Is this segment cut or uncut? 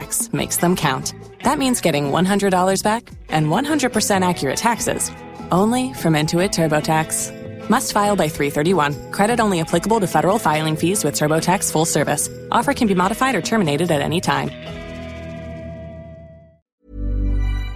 cut